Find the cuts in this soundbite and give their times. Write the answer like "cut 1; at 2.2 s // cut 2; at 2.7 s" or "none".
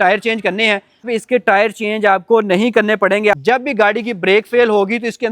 cut 1; at 1.1 s // cut 2; at 3.3 s